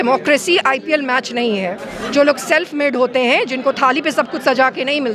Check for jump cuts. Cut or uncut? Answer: cut